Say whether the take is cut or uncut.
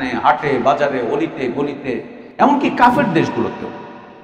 cut